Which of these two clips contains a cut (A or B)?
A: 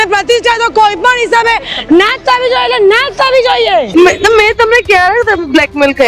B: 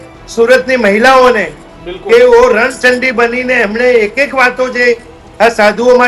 A